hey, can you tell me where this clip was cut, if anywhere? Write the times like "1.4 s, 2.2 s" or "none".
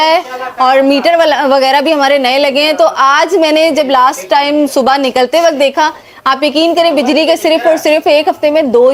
none